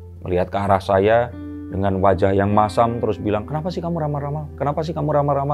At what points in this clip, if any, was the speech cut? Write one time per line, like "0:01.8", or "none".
none